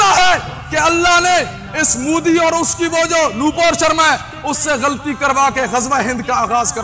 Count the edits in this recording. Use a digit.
0